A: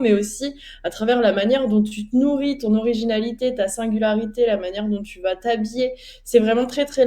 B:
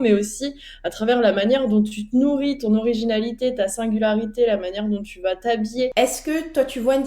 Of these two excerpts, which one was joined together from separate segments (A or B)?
B